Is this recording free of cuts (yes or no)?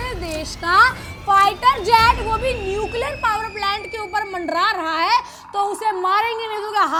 yes